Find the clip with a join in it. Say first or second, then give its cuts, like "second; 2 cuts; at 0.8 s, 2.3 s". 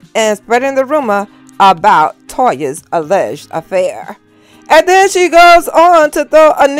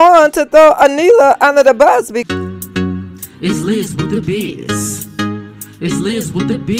second; 1 cut; at 2.2 s